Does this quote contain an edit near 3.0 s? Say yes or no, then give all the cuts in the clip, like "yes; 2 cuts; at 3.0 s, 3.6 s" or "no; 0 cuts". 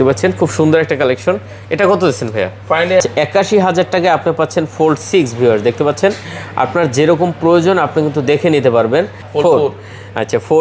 yes; 2 cuts; at 3.0 s, 9.2 s